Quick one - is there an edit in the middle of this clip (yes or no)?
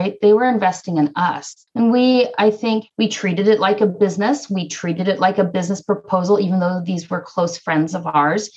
no